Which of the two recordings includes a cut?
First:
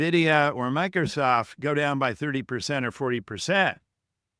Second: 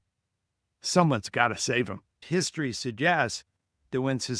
second; 1 cut; at 2.2 s

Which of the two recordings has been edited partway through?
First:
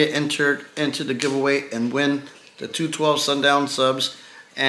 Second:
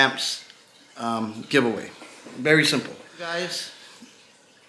second; 1 cut; at 3.3 s

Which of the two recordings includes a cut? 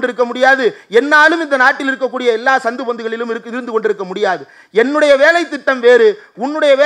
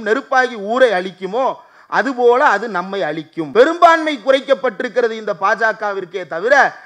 second; 1 cut; at 3.3 s

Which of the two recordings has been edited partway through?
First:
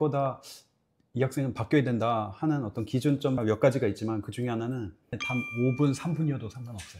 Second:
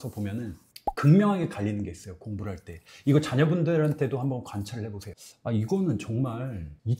first; 1 cut; at 5.2 s

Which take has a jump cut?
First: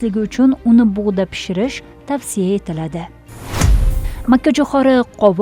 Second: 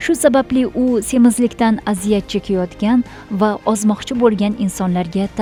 first; 1 cut; at 3.5 s

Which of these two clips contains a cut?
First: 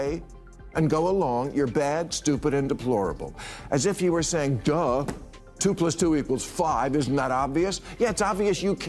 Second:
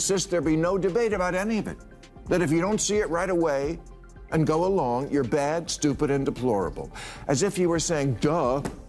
second; 1 cut; at 1.9 s

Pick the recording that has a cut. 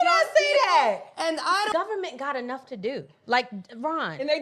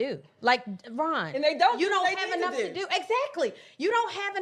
first; 1 cut; at 1.7 s

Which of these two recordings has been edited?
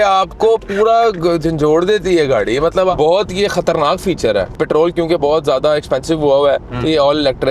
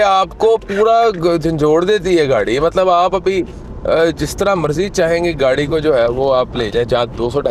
first; 2 cuts; at 2.9 s, 4.6 s

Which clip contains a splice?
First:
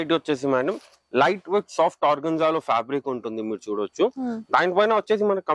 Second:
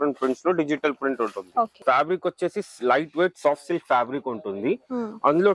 second; 1 cut; at 1.8 s

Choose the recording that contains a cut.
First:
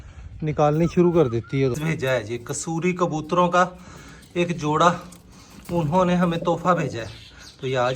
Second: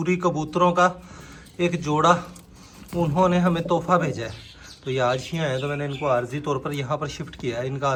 first; 1 cut; at 1.8 s

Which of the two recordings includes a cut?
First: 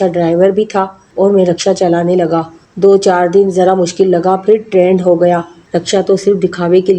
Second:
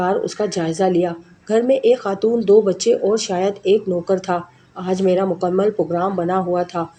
first; 2 cuts; at 1.0 s, 5.5 s

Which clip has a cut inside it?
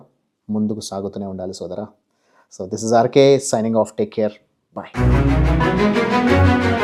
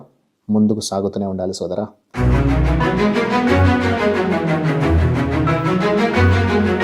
second; 1 cut; at 2.0 s

